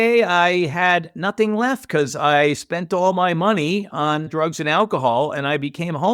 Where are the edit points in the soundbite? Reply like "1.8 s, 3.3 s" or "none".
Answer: none